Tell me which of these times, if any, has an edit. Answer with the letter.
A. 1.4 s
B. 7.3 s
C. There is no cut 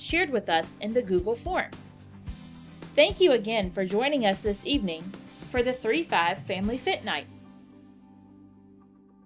B